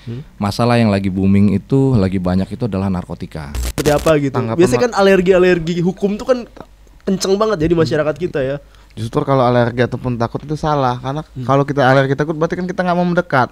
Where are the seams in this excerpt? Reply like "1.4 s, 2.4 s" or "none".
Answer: 3.8 s